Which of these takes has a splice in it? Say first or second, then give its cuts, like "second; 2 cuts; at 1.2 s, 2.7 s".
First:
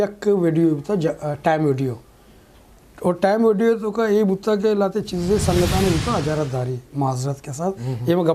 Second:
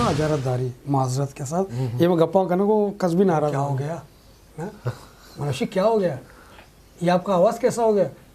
second; 1 cut; at 3.6 s